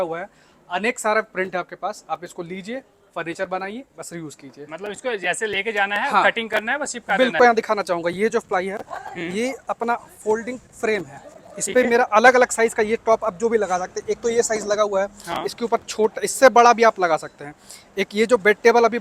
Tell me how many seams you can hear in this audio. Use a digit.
1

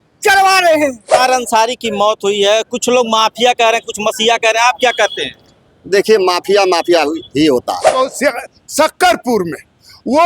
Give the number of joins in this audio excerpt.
2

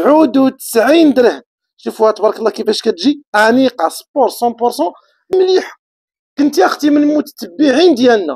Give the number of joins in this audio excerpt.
1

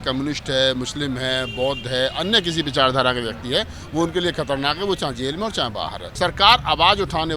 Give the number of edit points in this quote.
1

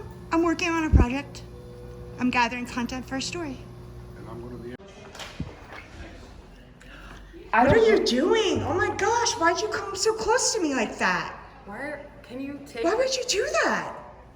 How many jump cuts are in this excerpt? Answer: 1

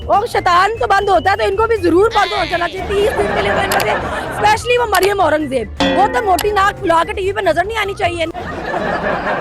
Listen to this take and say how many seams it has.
1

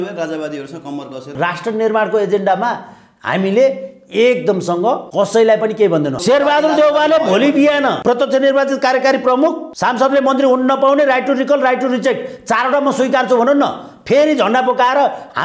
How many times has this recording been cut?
5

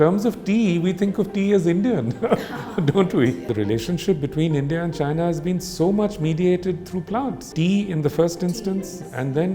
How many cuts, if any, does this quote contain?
2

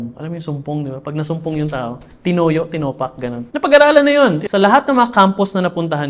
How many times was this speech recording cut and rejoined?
2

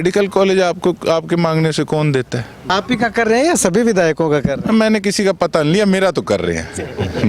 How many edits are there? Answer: 1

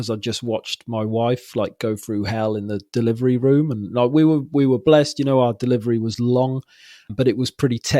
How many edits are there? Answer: 1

